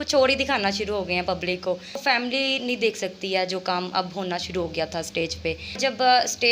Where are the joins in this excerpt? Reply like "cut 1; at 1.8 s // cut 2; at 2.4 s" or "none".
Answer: cut 1; at 2.0 s // cut 2; at 5.8 s